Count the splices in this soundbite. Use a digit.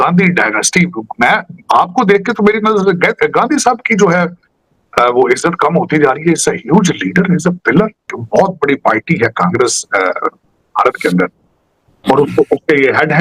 1